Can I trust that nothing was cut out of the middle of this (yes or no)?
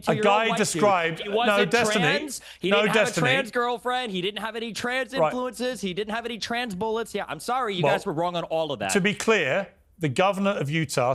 yes